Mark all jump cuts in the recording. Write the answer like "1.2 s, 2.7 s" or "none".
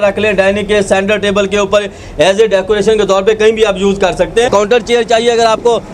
4.5 s